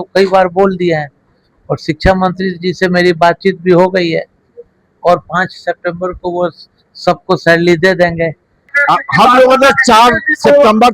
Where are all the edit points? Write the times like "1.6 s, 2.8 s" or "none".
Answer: 8.7 s